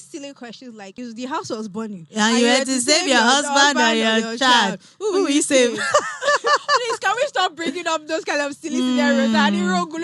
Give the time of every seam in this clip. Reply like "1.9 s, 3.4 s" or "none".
0.9 s

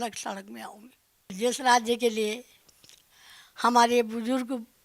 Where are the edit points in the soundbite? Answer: 1.3 s

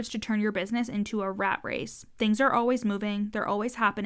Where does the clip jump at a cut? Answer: none

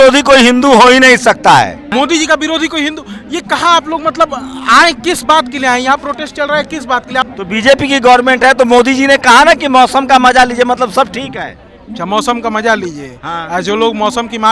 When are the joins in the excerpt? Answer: 1.8 s, 7.3 s

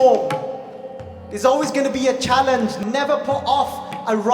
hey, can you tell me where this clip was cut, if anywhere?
2.8 s

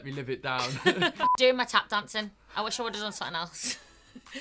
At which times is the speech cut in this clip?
1.2 s

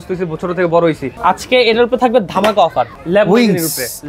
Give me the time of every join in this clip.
1.1 s, 3.0 s

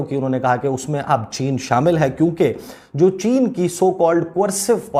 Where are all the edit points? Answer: none

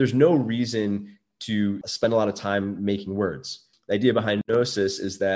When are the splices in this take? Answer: 1.9 s, 3.6 s, 4.4 s

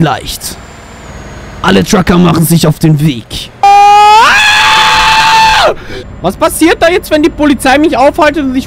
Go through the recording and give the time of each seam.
3.6 s, 6.1 s

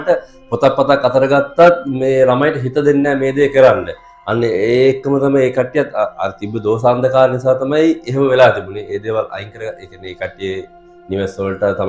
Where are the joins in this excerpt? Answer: none

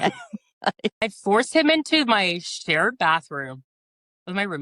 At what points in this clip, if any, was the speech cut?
1.0 s

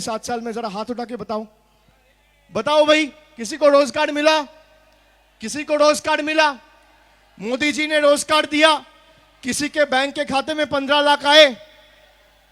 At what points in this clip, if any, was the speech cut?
none

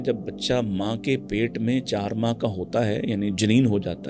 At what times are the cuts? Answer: none

